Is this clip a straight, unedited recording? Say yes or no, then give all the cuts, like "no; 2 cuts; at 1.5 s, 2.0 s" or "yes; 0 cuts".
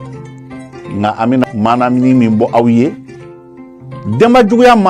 no; 1 cut; at 1.4 s